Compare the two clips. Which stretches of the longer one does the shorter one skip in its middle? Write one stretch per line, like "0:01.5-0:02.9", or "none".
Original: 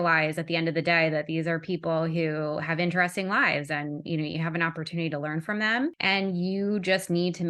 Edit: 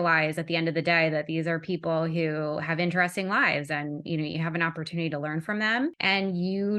none